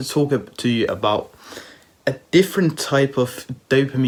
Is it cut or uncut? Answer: uncut